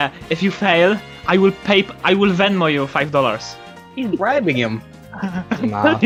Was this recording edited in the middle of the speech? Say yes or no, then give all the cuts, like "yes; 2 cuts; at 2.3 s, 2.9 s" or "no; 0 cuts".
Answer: no; 0 cuts